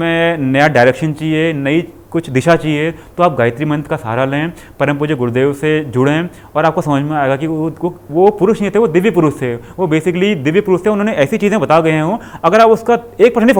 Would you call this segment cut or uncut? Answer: uncut